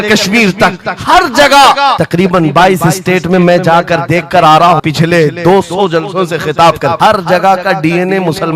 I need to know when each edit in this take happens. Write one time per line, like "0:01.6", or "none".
0:02.0
0:04.8
0:07.0